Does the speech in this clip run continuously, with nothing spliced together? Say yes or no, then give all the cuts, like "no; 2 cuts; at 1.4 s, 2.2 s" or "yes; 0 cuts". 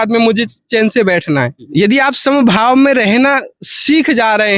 no; 1 cut; at 1.6 s